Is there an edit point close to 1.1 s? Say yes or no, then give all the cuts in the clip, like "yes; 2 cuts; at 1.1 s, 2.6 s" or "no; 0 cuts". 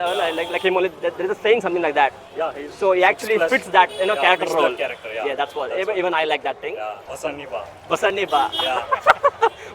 no; 1 cut; at 7.0 s